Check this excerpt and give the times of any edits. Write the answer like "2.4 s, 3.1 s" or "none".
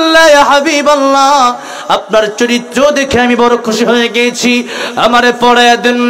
none